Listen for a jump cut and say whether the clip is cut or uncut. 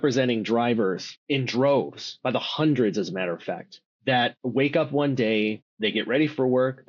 cut